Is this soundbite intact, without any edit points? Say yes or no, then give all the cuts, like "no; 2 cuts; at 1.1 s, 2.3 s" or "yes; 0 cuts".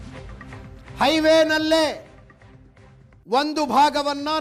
yes; 0 cuts